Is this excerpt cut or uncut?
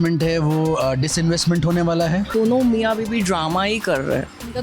cut